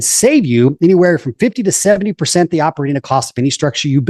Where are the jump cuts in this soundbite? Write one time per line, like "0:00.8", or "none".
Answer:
none